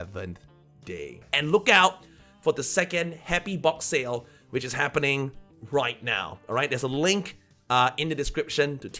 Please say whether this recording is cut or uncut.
cut